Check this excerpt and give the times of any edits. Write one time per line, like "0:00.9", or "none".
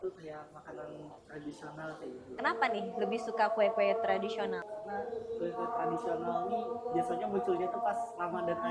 0:01.2
0:02.4
0:04.6